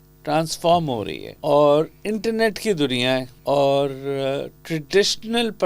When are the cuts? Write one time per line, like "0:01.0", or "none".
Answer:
0:01.2
0:03.3